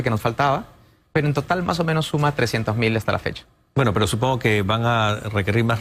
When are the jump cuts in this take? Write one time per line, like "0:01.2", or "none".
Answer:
0:02.7